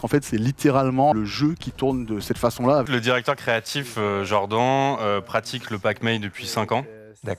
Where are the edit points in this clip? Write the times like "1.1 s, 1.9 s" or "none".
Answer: 1.1 s, 2.9 s